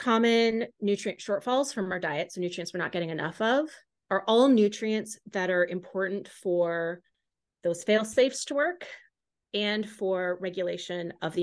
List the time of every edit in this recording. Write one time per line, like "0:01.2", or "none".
none